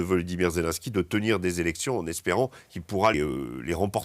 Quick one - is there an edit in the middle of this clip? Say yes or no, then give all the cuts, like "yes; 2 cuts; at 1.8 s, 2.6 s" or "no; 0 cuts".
yes; 1 cut; at 3.1 s